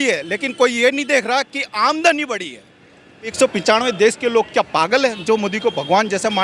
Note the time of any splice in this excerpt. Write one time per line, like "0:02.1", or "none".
0:03.3